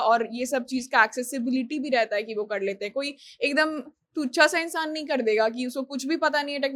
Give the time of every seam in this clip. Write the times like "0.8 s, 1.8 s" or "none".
none